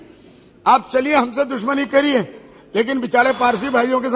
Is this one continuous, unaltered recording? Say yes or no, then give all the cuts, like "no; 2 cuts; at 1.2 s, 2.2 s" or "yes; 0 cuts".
yes; 0 cuts